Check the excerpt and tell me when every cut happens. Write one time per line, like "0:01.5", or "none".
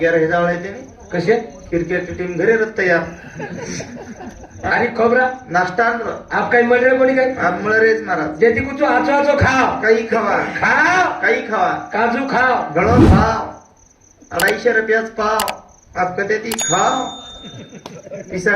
0:04.6

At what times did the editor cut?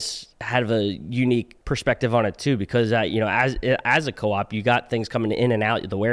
0:01.6

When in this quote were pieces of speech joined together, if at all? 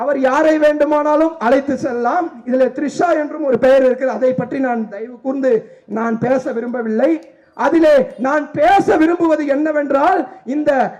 none

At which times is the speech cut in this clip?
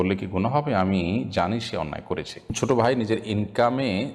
0:02.5

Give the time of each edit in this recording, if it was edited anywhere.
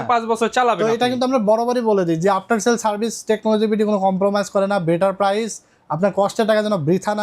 none

